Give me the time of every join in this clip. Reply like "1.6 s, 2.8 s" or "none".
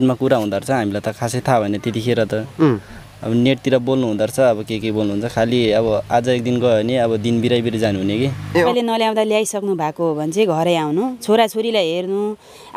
8.7 s

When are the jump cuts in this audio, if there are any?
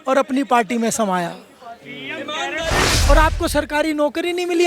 2.9 s

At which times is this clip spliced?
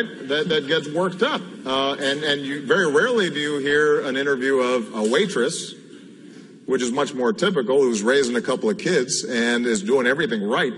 5.4 s

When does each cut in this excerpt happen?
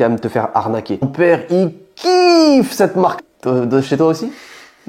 1.1 s

